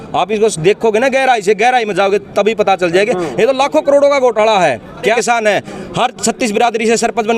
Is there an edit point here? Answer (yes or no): yes